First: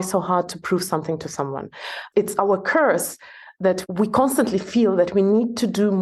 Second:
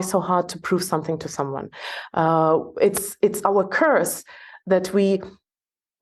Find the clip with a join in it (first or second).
first